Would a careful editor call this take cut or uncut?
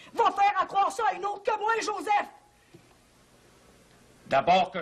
uncut